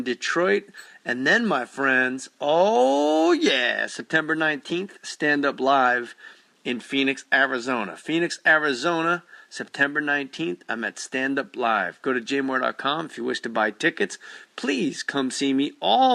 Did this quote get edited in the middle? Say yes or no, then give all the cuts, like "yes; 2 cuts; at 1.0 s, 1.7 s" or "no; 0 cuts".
no; 0 cuts